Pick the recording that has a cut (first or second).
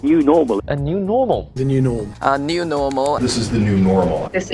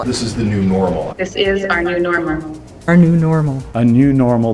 second